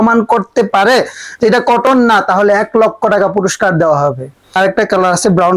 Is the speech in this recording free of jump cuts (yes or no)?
no